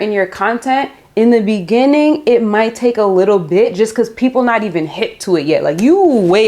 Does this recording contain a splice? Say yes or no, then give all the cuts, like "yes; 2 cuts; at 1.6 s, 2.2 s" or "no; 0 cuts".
no; 0 cuts